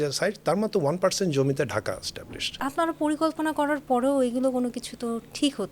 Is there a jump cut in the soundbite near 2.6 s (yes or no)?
yes